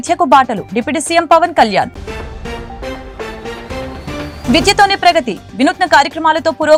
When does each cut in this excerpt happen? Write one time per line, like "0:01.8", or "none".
none